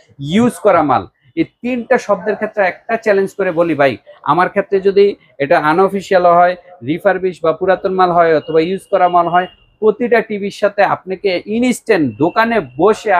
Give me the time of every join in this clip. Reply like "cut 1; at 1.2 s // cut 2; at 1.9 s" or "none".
none